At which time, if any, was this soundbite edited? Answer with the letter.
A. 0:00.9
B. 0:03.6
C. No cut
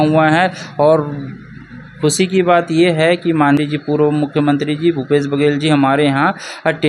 B